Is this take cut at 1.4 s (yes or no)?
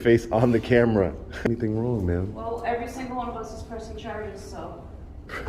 yes